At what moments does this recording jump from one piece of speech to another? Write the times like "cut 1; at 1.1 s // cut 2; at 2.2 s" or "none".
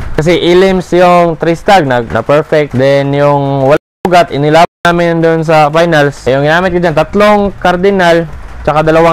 cut 1; at 2.6 s // cut 2; at 6.2 s